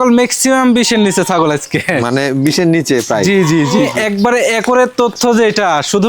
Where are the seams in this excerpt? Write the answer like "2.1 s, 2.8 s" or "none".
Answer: 3.9 s